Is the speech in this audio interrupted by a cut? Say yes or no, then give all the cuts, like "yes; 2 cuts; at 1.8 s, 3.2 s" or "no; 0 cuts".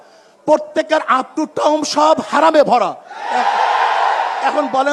no; 0 cuts